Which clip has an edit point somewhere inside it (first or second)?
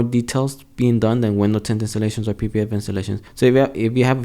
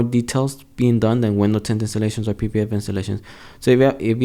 first